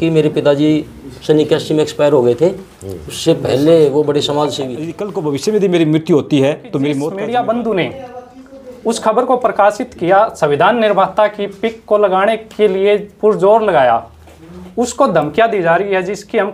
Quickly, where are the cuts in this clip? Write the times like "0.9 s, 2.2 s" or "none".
5.1 s, 7.0 s